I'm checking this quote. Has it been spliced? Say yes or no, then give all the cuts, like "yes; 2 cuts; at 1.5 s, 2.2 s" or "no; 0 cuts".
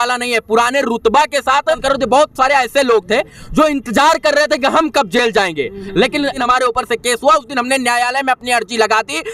yes; 2 cuts; at 1.8 s, 6.4 s